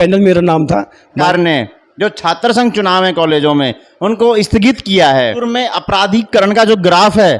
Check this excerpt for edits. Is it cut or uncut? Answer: cut